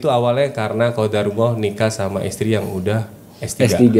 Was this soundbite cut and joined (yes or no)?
no